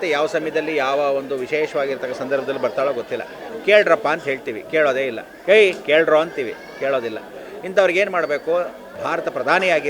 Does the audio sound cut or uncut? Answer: cut